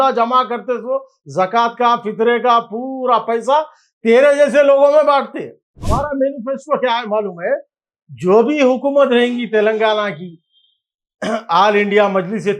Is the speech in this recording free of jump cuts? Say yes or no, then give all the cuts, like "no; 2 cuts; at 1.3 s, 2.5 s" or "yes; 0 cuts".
no; 1 cut; at 5.8 s